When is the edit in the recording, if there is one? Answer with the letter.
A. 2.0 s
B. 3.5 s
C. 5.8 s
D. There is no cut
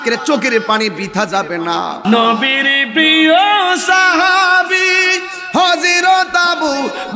A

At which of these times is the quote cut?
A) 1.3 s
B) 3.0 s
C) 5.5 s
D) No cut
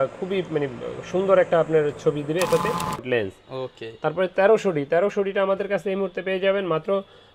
B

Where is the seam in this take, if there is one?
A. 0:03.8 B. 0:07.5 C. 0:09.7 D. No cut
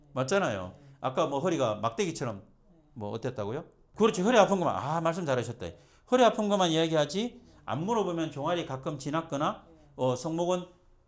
A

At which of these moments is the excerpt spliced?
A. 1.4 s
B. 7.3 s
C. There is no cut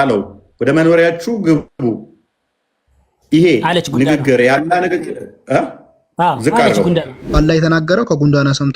B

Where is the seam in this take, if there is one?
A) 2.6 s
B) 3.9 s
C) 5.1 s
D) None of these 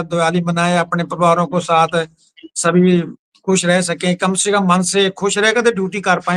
D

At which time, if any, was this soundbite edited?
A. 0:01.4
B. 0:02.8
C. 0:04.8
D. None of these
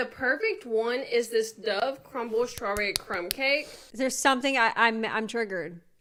D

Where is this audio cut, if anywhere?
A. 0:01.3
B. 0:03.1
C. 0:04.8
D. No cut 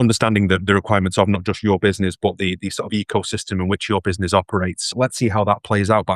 C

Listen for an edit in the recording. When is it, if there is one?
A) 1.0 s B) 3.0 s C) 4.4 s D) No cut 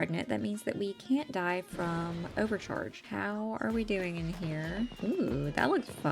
B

